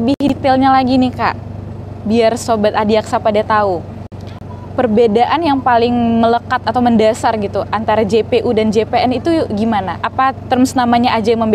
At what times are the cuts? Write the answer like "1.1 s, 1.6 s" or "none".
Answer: none